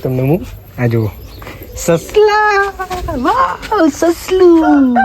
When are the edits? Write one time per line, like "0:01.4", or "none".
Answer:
none